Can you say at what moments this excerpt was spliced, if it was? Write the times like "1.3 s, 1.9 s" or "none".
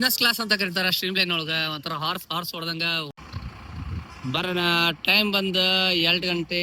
3.2 s